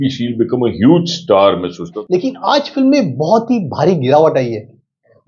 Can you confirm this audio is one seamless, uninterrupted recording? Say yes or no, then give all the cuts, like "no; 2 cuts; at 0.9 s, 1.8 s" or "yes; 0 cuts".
no; 1 cut; at 2.0 s